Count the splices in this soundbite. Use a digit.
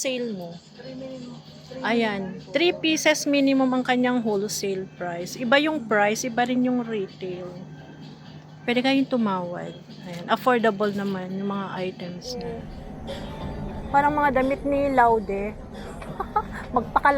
1